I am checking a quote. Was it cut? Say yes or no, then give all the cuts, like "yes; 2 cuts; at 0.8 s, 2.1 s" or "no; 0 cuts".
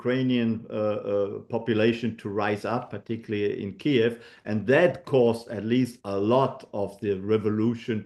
no; 0 cuts